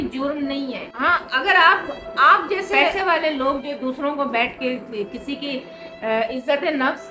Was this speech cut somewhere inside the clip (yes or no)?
no